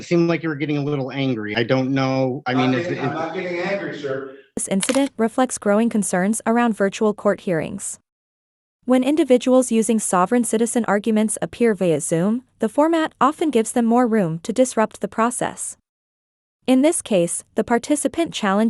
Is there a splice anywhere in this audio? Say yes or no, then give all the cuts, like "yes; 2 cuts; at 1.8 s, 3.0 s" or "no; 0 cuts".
no; 0 cuts